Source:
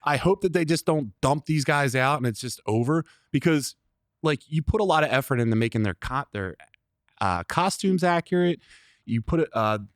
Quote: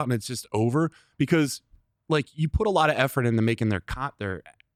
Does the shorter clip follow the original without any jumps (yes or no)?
yes